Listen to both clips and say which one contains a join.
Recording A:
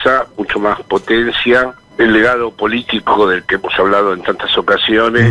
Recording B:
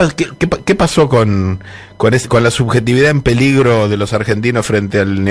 A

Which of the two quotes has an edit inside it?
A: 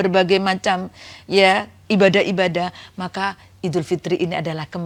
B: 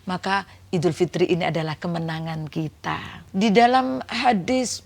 B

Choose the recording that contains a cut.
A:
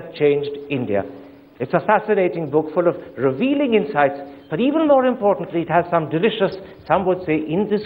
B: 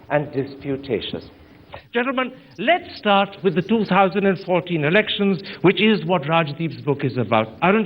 B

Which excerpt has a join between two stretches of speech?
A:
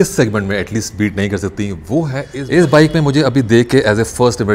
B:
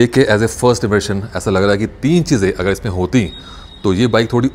A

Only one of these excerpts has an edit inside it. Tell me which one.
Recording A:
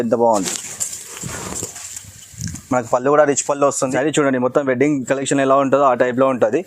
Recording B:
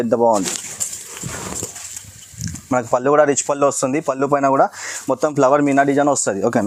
A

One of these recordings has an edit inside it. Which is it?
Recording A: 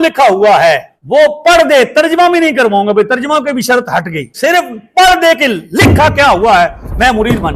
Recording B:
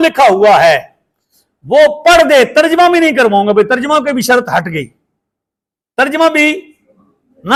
A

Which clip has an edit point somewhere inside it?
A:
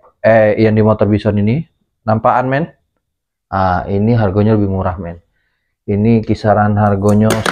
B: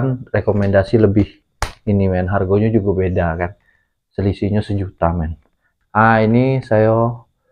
B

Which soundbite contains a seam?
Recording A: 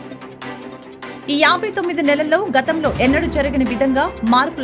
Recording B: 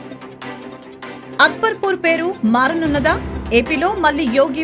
B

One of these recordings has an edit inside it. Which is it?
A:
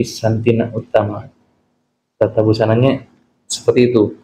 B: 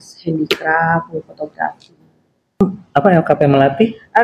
B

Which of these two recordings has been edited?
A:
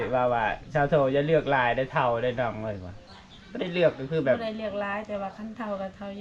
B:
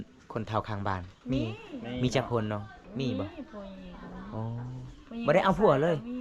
B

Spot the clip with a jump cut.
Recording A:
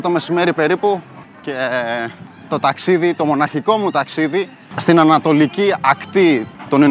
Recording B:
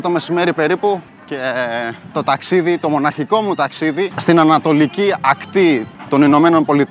B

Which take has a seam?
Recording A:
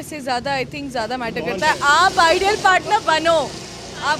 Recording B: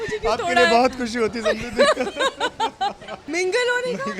B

